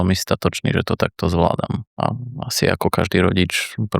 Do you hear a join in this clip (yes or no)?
yes